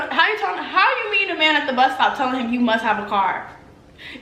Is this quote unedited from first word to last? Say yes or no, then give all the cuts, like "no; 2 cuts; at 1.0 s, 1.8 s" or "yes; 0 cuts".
yes; 0 cuts